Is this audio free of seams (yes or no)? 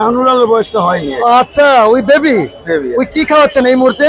yes